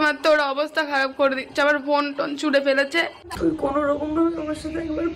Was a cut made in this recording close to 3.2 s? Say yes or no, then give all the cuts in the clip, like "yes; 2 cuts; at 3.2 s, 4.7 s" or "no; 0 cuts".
yes; 1 cut; at 3.2 s